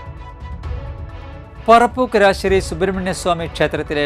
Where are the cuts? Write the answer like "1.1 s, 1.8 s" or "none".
1.6 s